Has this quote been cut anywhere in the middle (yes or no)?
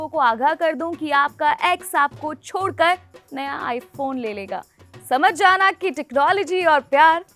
no